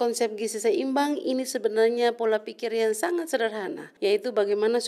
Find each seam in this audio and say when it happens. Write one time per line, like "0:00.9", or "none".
0:03.8